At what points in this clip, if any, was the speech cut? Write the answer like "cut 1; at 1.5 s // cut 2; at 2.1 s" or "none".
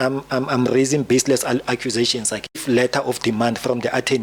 cut 1; at 2.6 s